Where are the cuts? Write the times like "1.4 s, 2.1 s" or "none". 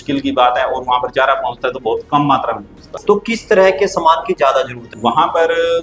2.9 s, 4.9 s